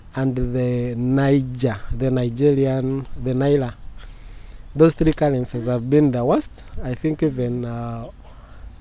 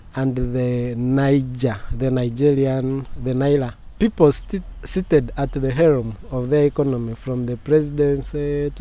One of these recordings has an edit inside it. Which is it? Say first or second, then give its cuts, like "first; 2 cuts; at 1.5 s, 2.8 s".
second; 1 cut; at 3.8 s